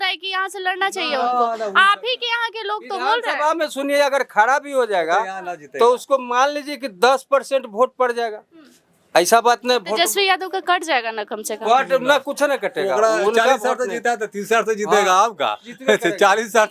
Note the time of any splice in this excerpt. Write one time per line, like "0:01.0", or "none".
none